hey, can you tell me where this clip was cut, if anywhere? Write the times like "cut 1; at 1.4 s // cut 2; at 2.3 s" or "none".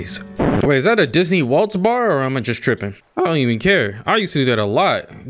cut 1; at 3.0 s